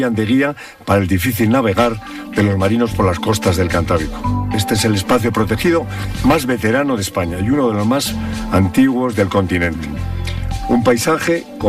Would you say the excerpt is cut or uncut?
uncut